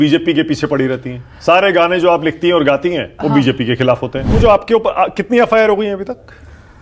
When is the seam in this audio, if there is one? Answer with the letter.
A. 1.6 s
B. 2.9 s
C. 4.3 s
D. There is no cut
C